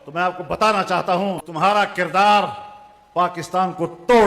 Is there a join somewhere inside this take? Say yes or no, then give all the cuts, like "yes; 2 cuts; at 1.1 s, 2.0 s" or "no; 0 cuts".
yes; 1 cut; at 1.4 s